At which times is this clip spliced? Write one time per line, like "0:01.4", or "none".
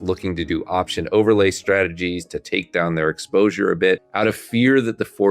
0:04.1